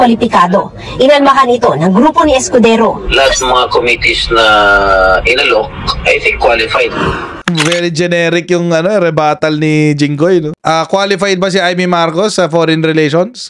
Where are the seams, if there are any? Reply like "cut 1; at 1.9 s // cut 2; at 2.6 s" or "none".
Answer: cut 1; at 10.5 s